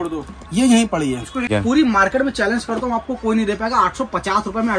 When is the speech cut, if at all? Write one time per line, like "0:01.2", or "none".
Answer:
0:01.5